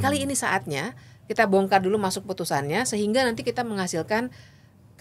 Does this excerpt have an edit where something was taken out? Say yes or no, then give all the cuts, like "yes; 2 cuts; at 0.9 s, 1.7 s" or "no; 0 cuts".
no; 0 cuts